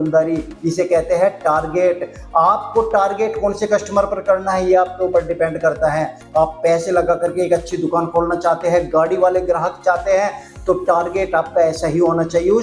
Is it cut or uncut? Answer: uncut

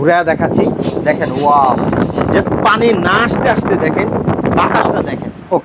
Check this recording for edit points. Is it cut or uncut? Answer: uncut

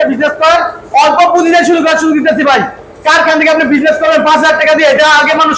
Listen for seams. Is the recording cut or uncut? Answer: uncut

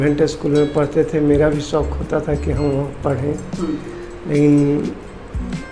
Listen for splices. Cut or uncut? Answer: uncut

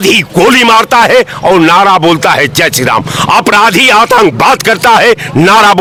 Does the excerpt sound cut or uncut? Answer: uncut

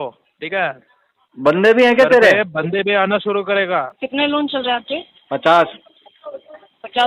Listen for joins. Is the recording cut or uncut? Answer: cut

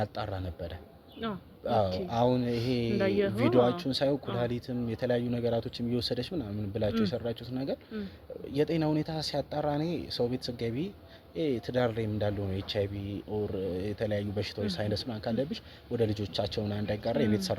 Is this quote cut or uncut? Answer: uncut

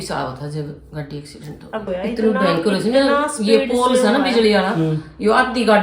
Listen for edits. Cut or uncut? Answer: cut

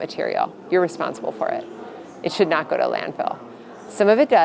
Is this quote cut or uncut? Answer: uncut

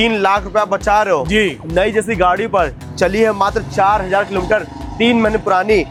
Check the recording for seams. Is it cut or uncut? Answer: uncut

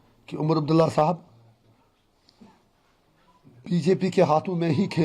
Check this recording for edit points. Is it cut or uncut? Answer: uncut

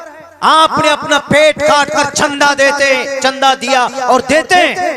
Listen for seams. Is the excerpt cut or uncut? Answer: uncut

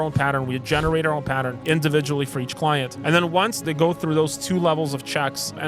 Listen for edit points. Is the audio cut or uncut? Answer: cut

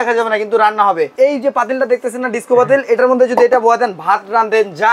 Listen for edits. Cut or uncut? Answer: cut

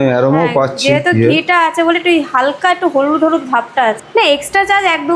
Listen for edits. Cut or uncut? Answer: cut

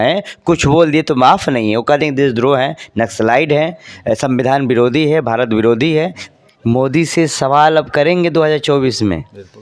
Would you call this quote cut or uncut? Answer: cut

